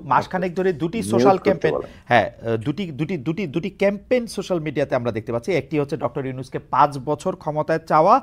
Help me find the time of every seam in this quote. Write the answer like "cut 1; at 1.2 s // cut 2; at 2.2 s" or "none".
none